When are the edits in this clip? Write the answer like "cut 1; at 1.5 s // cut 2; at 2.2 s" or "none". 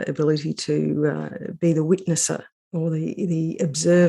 cut 1; at 2.6 s